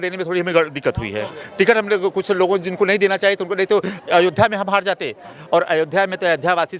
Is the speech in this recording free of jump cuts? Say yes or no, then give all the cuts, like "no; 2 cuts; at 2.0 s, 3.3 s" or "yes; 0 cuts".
yes; 0 cuts